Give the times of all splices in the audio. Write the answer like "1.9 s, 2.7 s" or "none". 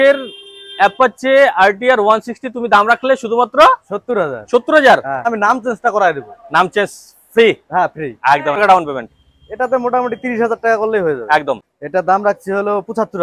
5.3 s, 8.6 s, 11.7 s